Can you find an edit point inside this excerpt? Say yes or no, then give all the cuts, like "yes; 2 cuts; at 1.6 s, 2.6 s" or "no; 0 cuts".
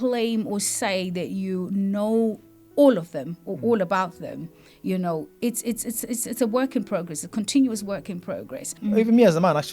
yes; 1 cut; at 8.7 s